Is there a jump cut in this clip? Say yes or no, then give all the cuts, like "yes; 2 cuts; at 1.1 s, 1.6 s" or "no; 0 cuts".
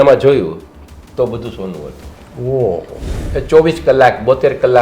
yes; 1 cut; at 3.2 s